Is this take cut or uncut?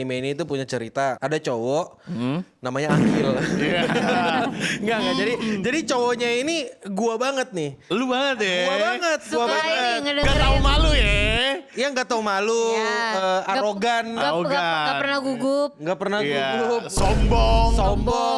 cut